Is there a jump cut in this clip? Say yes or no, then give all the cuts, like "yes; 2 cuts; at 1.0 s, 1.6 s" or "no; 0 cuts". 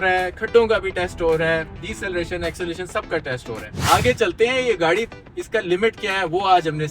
yes; 1 cut; at 3.8 s